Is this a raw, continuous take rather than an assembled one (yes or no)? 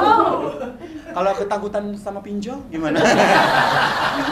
yes